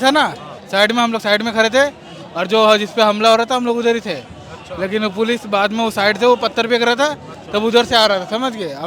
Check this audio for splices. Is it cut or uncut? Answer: uncut